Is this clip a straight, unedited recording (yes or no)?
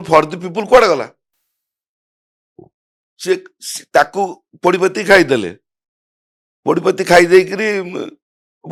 yes